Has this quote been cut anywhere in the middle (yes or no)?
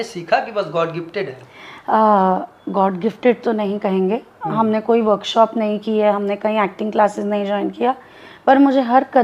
no